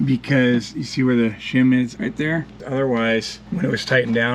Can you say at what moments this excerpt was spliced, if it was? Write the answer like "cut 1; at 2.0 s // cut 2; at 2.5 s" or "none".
cut 1; at 2.6 s // cut 2; at 3.4 s